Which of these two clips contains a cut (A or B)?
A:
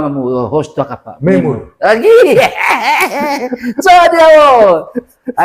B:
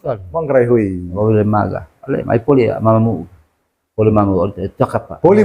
B